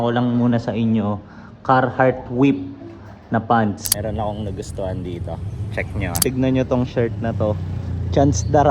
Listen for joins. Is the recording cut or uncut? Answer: cut